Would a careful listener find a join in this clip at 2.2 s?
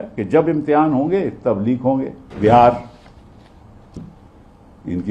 yes; 1 cut; at 2.2 s

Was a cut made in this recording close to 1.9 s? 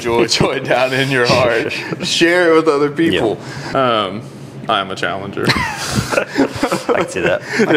no; 1 cut; at 3.6 s

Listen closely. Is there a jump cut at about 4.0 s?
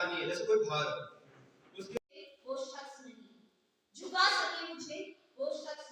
no; 1 cut; at 2.3 s

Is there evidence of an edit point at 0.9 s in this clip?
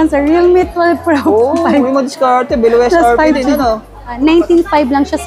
no; 1 cut; at 4.3 s

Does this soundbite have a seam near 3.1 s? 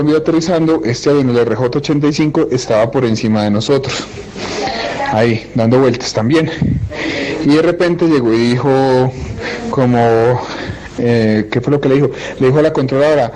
no; 1 cut; at 8.8 s

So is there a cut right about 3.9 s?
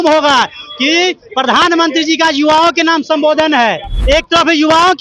yes; 1 cut; at 3.9 s

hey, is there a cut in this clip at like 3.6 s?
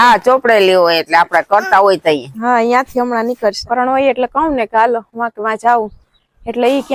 yes; 1 cut; at 3.6 s

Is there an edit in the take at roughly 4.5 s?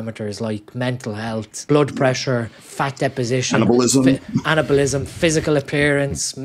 no; 2 cuts; at 1.5 s, 2.6 s

